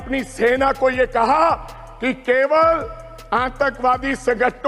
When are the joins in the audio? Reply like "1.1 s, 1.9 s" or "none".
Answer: none

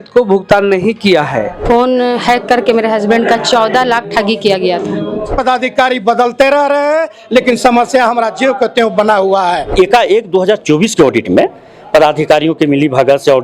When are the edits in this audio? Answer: 1.6 s, 5.3 s, 9.7 s

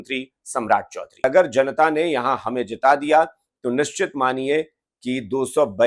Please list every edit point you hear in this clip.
1.2 s

